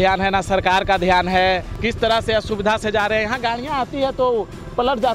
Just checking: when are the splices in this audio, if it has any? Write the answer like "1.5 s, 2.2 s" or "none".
1.8 s